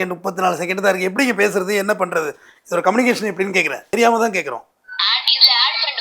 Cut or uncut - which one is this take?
cut